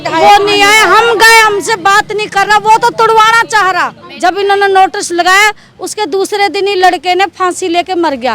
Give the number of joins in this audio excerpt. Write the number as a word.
one